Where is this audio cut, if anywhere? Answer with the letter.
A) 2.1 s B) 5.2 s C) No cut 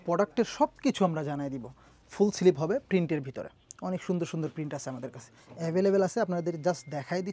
A